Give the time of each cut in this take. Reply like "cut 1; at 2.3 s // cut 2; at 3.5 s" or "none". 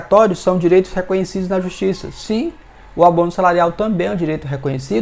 none